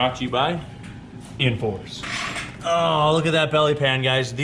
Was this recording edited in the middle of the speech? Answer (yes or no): yes